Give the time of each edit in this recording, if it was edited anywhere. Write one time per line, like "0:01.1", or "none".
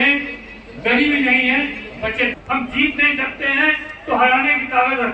0:02.3